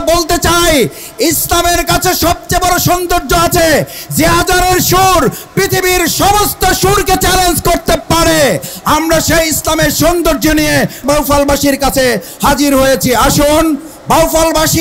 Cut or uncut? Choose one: cut